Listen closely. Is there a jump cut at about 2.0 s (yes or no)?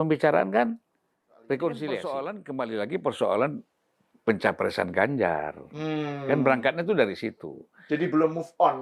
yes